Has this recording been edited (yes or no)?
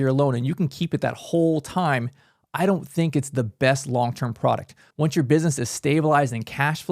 yes